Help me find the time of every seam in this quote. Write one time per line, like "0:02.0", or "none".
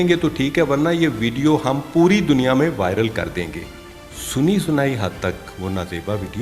none